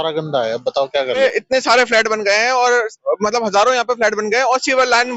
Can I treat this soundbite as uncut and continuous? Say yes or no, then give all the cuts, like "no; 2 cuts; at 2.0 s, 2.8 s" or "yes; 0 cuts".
no; 1 cut; at 1.2 s